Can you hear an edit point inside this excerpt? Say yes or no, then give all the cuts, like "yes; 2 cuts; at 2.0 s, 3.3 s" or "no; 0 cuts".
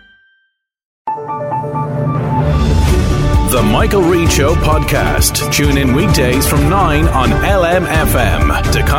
yes; 1 cut; at 0.9 s